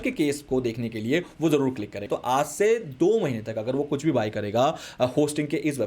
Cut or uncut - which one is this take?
cut